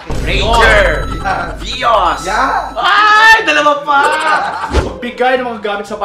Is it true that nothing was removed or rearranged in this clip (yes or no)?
no